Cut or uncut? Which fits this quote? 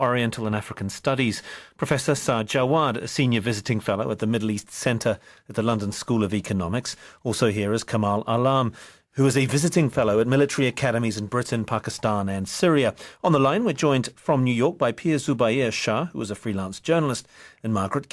uncut